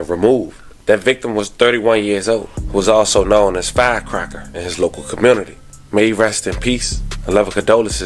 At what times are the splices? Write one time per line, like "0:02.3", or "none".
none